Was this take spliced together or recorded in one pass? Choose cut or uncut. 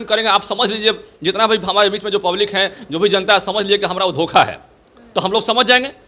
uncut